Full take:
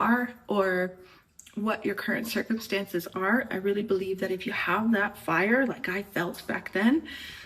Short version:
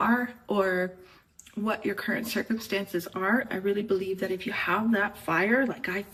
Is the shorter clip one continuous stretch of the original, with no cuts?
yes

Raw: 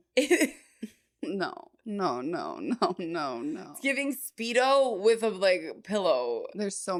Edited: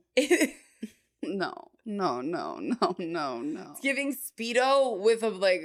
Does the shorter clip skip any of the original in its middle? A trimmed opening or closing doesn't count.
no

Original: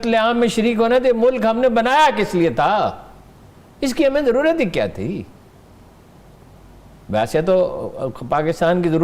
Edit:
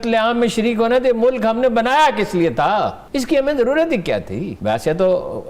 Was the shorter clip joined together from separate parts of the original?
yes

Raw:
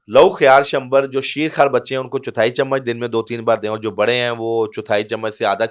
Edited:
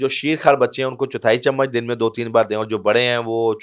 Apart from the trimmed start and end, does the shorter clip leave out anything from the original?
no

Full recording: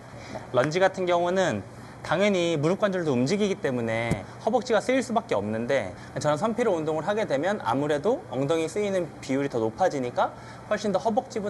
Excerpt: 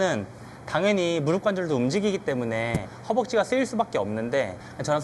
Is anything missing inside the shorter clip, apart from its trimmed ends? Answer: no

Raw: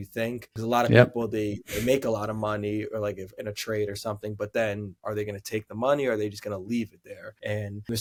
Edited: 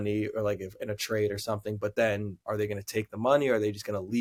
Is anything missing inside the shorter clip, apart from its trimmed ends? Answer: no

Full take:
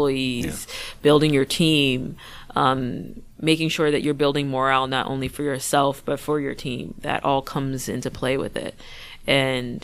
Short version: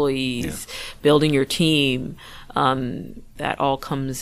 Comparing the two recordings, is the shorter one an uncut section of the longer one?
no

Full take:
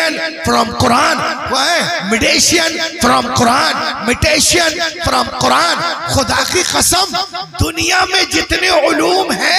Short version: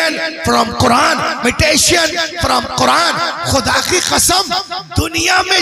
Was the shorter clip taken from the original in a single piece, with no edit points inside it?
no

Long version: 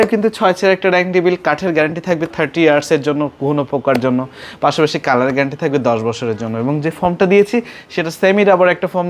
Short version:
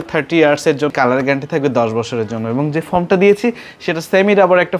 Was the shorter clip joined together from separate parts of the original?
yes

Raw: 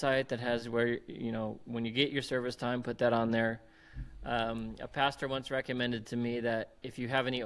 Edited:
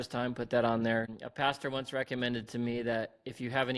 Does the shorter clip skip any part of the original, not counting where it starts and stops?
yes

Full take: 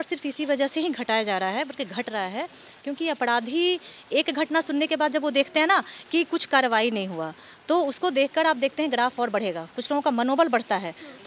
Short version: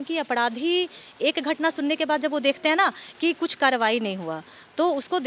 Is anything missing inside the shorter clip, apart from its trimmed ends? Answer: no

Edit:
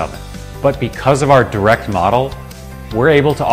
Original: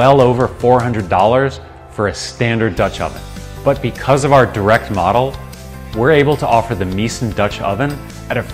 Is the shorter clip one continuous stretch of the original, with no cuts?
yes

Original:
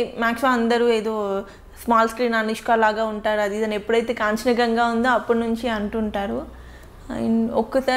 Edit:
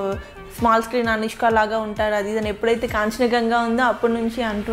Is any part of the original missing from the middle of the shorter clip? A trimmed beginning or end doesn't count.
no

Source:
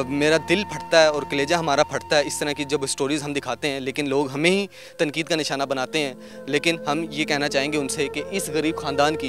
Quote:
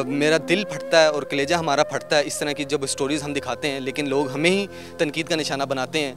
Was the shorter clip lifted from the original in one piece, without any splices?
yes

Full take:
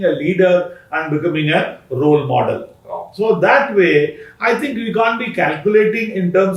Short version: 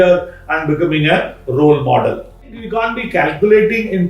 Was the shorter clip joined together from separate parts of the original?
yes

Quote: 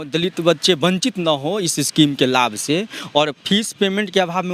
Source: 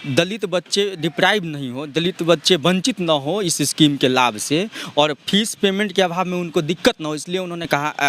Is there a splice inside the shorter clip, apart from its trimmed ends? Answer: no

